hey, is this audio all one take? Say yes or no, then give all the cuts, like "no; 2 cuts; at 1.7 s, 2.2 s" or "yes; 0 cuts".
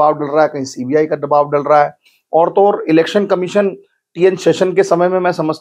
yes; 0 cuts